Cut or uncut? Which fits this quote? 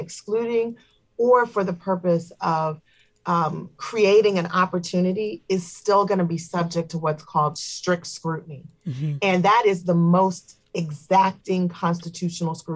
uncut